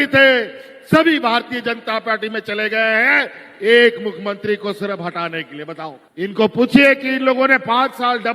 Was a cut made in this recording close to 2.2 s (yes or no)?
no